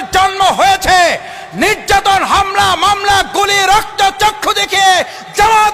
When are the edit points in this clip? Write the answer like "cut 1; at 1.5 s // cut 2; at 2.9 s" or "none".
none